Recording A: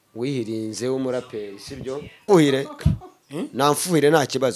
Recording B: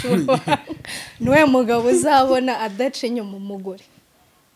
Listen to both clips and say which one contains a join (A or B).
A